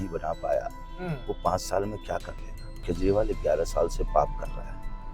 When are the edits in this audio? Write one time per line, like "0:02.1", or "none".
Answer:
0:02.8